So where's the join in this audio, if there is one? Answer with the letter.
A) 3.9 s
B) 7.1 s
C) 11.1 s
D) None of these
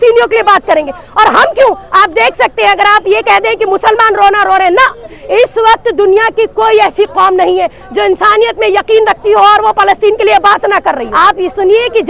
C